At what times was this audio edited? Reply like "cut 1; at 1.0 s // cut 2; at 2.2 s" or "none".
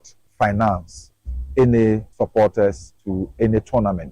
cut 1; at 2.1 s